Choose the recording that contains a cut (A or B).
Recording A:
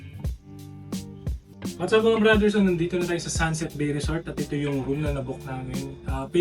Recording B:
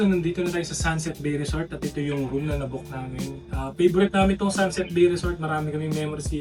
A